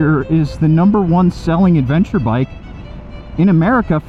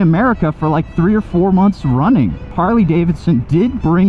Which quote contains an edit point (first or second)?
second